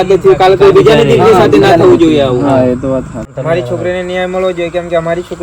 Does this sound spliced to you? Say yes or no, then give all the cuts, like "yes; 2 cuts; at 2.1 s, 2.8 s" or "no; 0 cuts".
yes; 1 cut; at 3.3 s